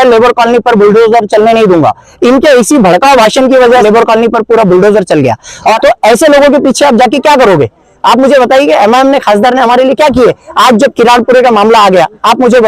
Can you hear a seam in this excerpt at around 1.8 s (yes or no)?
no